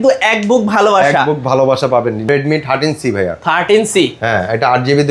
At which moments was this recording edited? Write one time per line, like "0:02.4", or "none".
0:02.3